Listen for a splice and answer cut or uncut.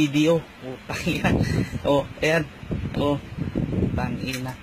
uncut